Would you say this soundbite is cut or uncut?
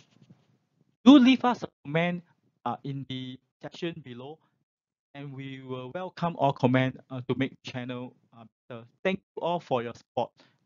uncut